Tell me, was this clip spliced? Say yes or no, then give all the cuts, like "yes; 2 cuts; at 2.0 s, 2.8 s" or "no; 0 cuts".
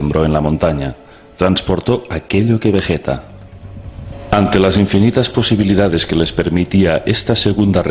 yes; 1 cut; at 1.8 s